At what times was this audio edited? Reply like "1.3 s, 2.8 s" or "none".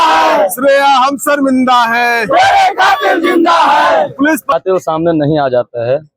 4.5 s